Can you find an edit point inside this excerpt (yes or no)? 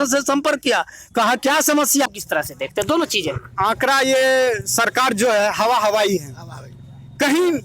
yes